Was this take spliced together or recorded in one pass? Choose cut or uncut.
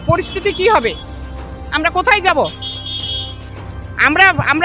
uncut